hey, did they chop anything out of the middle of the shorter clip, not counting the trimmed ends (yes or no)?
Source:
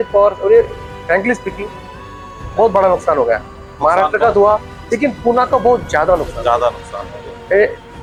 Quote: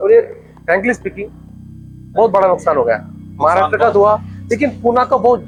no